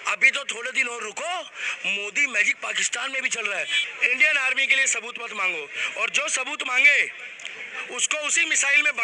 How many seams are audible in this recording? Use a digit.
1